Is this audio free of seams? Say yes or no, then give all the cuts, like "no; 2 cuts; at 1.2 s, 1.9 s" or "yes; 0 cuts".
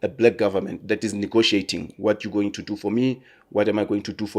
yes; 0 cuts